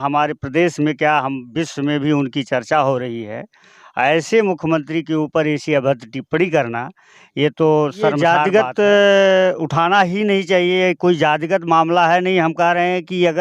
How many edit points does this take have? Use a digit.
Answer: 1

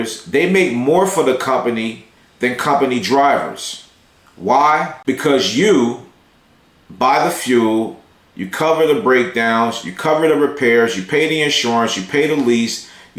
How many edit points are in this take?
1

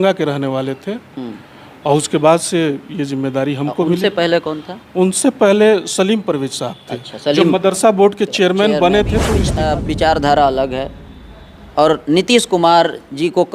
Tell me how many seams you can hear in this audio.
1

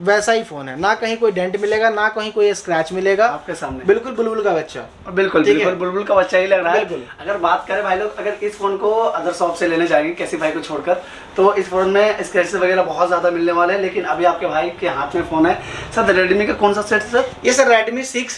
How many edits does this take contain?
0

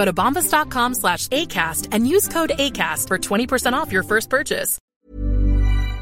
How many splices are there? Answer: 1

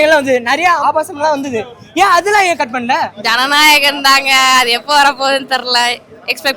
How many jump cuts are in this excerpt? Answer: 2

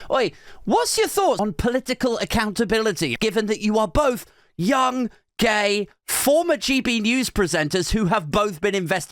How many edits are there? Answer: 2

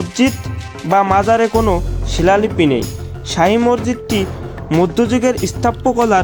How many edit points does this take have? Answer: 0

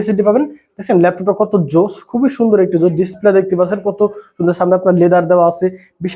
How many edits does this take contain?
0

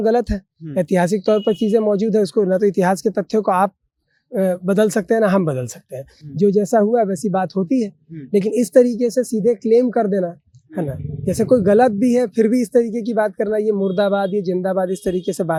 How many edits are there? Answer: 0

